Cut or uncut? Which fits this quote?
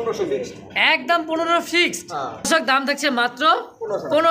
cut